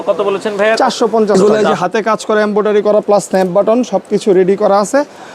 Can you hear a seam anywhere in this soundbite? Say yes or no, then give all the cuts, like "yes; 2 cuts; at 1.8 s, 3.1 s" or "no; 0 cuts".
yes; 1 cut; at 1.4 s